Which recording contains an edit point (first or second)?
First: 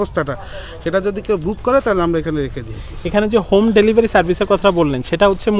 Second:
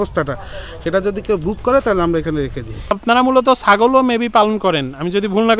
second